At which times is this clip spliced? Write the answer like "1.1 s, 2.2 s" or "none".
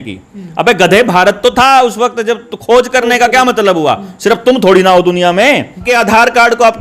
5.8 s